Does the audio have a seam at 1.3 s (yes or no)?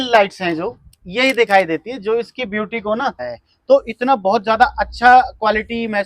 no